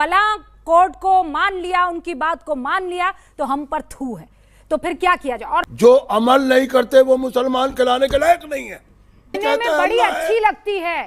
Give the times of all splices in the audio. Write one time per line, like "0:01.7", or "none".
0:05.7
0:09.4